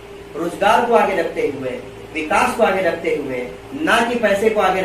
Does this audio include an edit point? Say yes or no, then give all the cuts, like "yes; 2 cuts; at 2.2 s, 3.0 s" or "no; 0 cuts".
no; 0 cuts